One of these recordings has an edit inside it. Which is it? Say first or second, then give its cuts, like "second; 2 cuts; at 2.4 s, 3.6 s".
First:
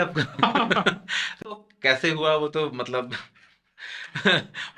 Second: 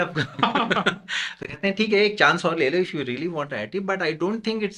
first; 1 cut; at 1.5 s